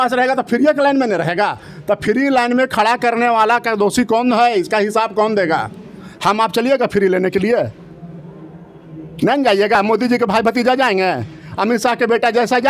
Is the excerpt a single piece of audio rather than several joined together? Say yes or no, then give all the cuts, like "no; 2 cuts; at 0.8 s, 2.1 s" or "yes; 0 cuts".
yes; 0 cuts